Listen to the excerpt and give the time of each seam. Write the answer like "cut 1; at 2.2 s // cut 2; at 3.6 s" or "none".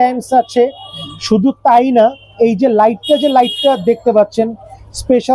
none